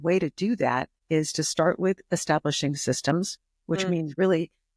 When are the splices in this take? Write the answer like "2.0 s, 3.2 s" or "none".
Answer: 0.9 s